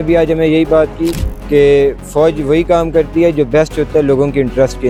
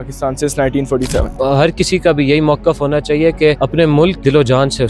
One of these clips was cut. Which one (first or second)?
second